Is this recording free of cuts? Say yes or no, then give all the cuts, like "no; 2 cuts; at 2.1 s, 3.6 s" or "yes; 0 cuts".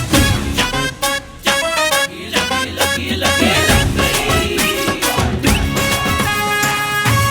no; 1 cut; at 6.0 s